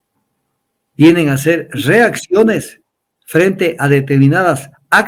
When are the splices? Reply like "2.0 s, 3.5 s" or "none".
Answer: none